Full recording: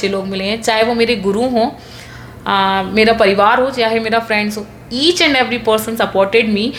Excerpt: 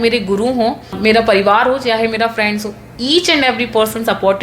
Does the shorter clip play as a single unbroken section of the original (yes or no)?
no